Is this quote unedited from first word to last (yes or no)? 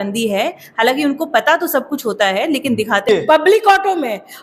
no